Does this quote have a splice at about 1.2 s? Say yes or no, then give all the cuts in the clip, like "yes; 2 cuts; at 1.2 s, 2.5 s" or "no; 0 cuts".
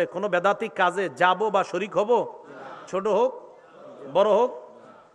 no; 0 cuts